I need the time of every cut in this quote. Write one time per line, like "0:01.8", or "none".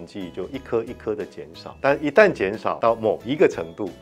0:01.6
0:02.8